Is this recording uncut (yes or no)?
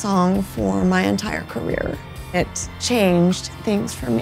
no